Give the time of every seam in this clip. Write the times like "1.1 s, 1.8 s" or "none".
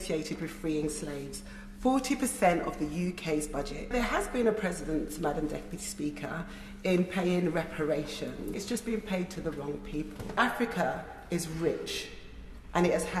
3.9 s, 8.6 s, 10.4 s